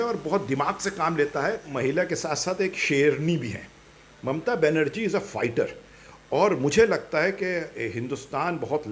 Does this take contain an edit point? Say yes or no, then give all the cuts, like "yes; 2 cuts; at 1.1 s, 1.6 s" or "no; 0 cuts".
yes; 1 cut; at 1.7 s